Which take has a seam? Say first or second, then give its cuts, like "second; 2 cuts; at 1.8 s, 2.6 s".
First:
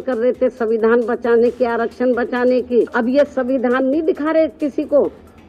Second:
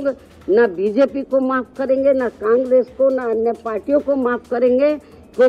first; 1 cut; at 2.9 s